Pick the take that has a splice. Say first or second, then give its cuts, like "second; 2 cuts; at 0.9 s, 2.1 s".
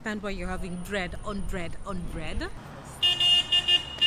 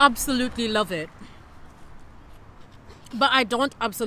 first; 1 cut; at 2.6 s